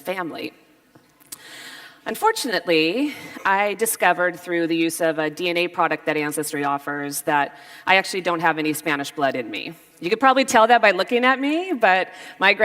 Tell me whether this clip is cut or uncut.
cut